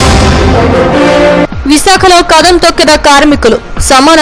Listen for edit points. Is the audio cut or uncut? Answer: cut